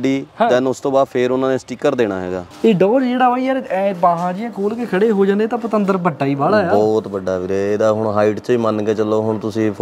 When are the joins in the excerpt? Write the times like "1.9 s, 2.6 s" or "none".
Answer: 2.4 s